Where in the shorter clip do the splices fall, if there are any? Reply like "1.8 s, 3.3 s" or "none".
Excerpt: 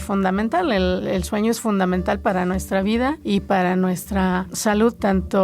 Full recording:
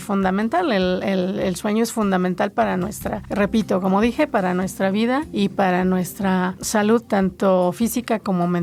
1.0 s, 2.2 s